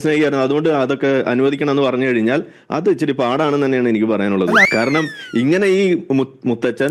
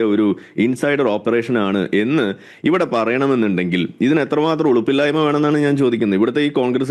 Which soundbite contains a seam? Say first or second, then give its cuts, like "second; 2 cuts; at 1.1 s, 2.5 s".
first; 1 cut; at 4.6 s